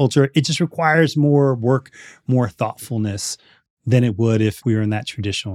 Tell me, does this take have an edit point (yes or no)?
yes